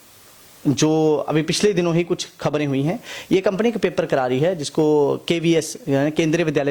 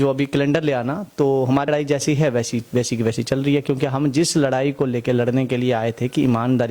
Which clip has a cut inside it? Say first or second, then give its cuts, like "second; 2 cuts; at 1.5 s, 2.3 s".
second; 1 cut; at 1.7 s